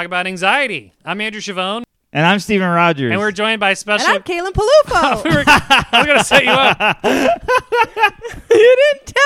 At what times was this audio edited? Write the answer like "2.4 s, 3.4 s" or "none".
2.0 s